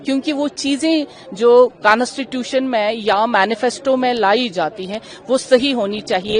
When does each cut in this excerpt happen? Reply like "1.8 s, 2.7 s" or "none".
none